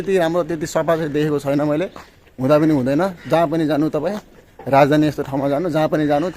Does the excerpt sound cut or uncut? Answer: uncut